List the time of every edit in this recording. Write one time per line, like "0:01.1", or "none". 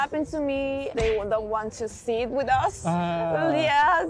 0:00.9